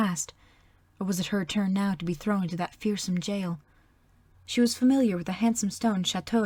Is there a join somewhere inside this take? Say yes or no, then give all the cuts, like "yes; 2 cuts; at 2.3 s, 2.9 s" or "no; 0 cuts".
no; 0 cuts